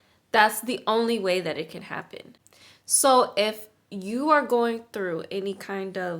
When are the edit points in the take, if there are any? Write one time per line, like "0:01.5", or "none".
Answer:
0:02.4